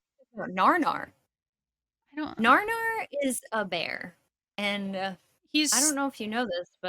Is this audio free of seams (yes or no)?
yes